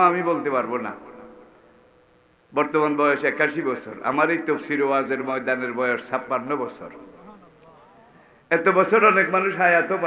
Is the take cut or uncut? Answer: uncut